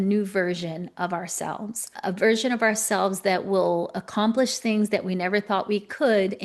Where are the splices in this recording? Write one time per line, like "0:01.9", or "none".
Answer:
0:01.9